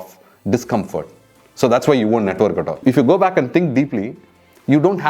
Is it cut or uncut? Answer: uncut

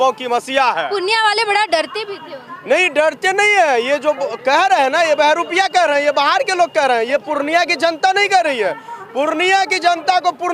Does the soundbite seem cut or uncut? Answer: uncut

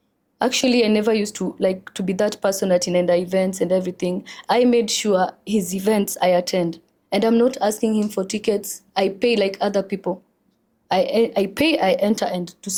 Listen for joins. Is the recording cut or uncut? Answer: uncut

